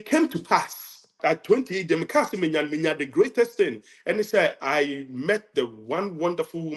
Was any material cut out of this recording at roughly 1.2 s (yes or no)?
yes